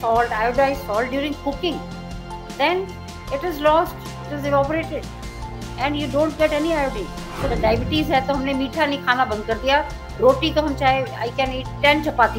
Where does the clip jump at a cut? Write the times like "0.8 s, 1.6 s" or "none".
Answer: 7.5 s